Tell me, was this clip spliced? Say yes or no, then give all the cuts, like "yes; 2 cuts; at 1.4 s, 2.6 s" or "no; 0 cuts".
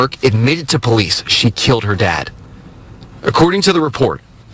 no; 0 cuts